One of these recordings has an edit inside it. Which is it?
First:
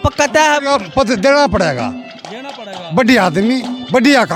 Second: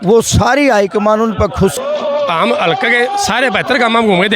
second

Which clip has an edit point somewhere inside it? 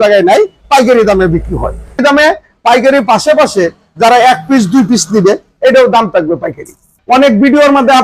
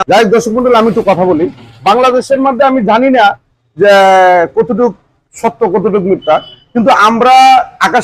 first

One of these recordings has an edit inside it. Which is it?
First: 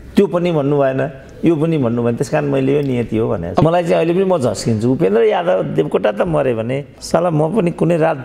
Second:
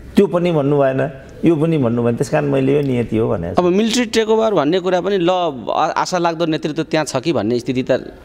first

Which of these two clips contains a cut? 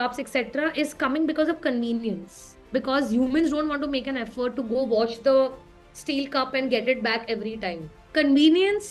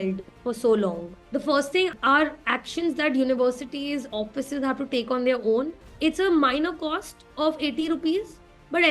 second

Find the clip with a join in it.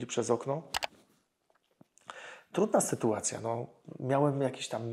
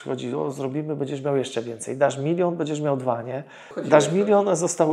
second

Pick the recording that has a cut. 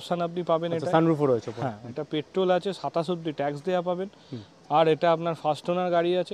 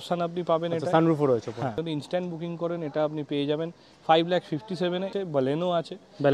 second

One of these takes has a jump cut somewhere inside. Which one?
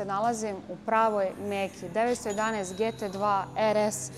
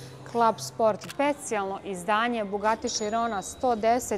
second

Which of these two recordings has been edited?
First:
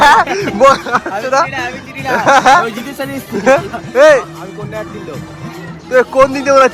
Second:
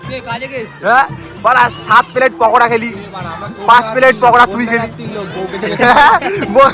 second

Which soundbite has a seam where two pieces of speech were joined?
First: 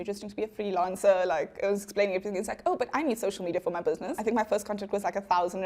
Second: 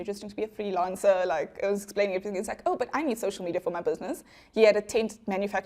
first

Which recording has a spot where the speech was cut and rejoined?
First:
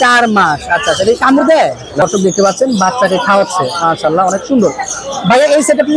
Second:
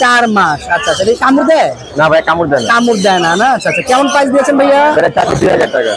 first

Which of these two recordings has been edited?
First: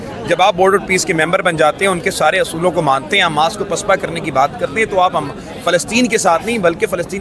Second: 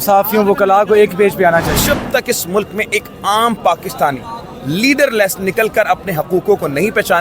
second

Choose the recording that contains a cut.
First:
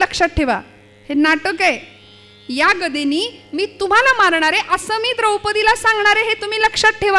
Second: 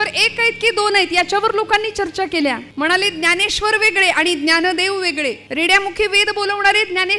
second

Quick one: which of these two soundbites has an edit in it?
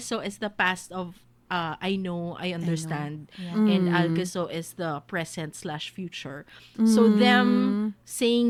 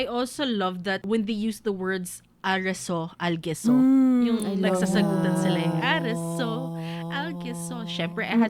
second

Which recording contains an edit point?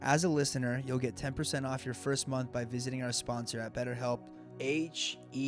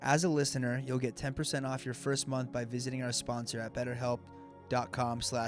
first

